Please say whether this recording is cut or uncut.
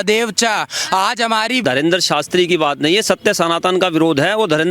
cut